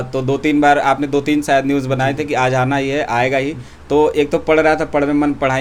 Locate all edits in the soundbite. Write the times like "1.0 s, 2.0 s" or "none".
none